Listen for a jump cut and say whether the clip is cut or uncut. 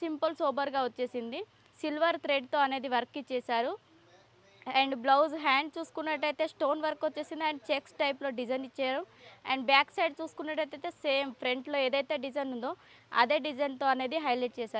uncut